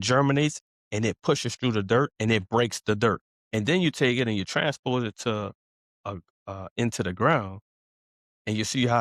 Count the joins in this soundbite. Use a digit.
1